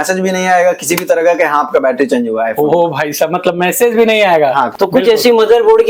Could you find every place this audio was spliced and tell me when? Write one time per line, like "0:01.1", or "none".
0:04.7